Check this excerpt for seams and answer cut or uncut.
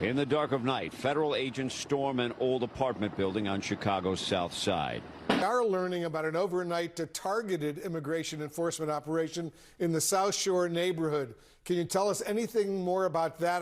cut